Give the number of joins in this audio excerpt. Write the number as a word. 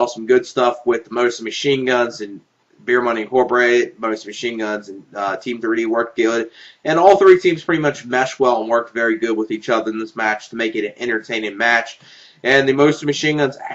one